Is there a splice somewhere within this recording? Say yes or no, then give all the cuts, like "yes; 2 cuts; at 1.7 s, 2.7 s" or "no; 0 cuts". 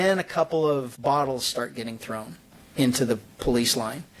yes; 1 cut; at 0.9 s